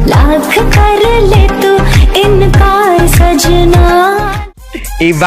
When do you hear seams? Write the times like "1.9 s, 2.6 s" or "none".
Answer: 4.3 s